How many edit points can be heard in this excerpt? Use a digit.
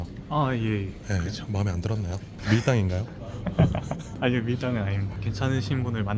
1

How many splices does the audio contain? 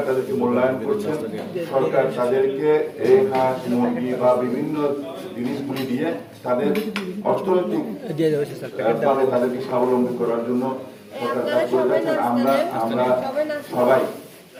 0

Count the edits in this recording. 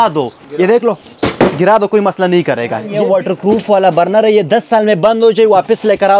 1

